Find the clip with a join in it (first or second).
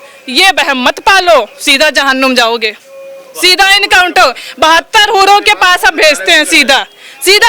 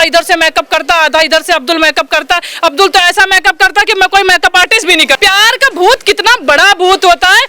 second